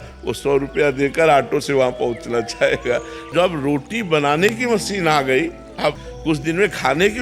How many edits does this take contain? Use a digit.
2